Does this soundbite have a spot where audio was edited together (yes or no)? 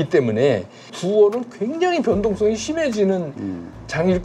yes